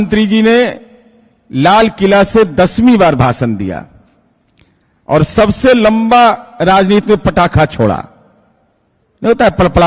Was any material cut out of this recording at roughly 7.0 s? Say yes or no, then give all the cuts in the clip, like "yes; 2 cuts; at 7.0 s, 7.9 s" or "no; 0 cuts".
no; 0 cuts